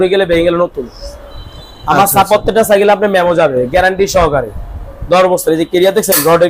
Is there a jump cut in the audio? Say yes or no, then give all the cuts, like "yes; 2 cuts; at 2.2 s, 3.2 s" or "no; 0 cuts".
no; 0 cuts